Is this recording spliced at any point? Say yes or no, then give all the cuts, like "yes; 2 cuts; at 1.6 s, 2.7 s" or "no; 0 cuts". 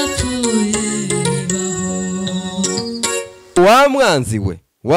yes; 1 cut; at 3.6 s